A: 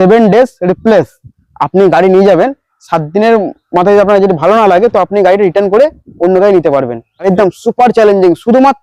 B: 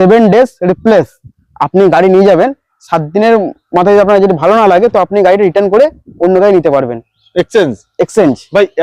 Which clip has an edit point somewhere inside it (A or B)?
A